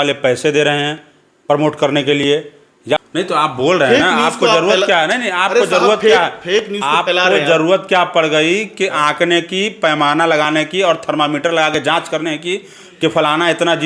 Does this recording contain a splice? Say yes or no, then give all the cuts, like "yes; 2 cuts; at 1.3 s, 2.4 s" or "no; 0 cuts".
yes; 1 cut; at 3.0 s